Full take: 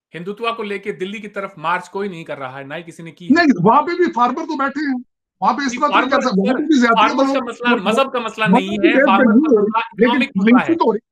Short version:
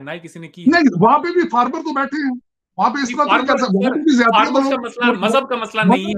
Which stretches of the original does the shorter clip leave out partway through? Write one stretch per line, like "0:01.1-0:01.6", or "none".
none